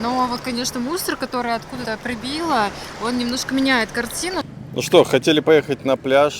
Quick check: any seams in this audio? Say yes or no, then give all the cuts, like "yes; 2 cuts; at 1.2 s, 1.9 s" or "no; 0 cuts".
yes; 2 cuts; at 1.8 s, 4.4 s